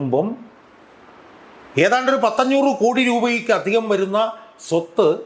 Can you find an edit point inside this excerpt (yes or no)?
no